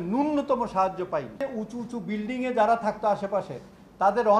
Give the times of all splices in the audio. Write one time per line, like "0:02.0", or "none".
0:01.5